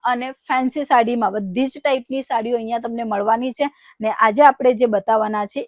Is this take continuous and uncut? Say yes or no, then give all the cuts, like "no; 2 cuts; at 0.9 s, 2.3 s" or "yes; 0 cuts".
yes; 0 cuts